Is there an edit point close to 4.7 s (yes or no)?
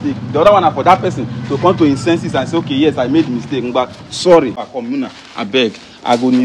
yes